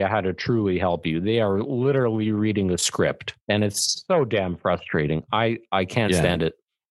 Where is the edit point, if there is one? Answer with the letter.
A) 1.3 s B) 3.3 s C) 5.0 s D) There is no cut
B